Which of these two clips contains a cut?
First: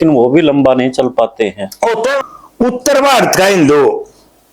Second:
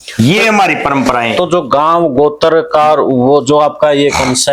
first; 1 cut; at 2.2 s

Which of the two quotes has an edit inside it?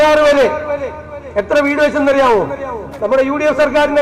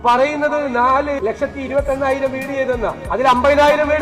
second; 2 cuts; at 1.2 s, 3.0 s

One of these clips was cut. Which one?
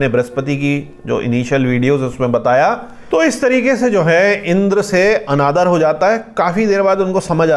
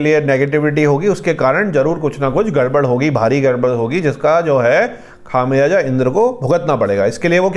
first; 1 cut; at 3.0 s

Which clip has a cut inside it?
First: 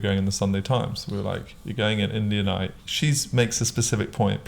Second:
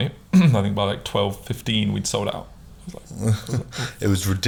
first; 1 cut; at 2.8 s

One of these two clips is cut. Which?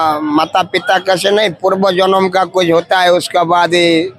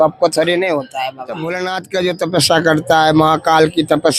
second; 1 cut; at 1.2 s

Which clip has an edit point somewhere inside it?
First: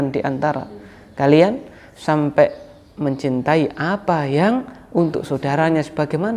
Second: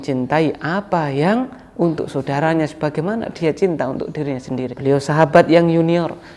second; 1 cut; at 4.7 s

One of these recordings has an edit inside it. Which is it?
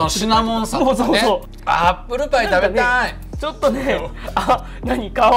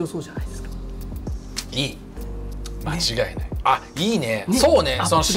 first; 1 cut; at 1.5 s

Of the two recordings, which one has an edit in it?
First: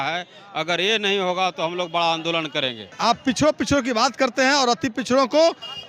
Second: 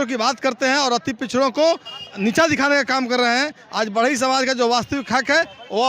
first; 1 cut; at 2.8 s

